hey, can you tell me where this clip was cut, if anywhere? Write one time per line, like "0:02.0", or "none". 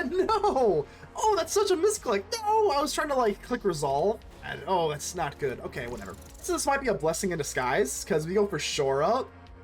0:04.5
0:06.4